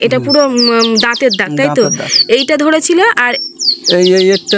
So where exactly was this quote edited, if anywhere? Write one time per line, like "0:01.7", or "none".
none